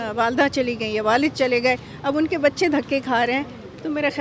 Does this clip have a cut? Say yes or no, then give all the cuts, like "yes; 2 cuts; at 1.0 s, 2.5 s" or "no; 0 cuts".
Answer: no; 0 cuts